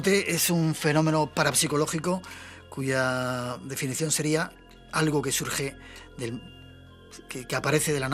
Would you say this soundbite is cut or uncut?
uncut